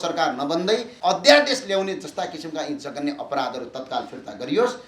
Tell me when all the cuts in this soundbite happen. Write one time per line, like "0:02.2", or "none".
0:00.9